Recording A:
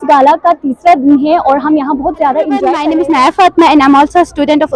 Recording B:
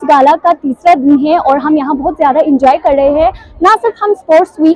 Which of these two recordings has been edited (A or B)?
A